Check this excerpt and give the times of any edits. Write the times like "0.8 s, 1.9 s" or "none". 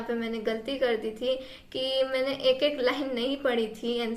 none